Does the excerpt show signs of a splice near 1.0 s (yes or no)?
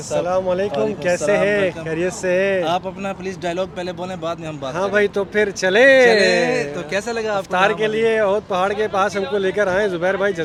no